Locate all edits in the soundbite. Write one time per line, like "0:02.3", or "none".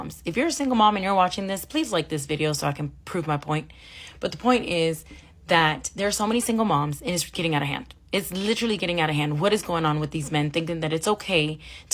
0:02.2